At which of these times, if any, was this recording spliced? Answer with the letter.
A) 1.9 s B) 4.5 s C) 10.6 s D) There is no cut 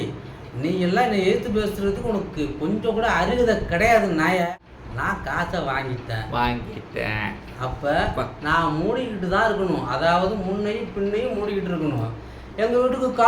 B